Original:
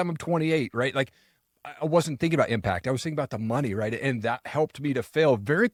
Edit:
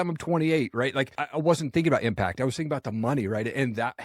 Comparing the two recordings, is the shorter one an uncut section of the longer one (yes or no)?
no